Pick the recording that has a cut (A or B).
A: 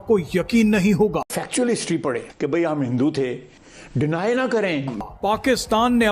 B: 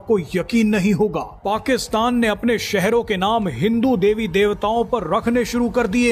A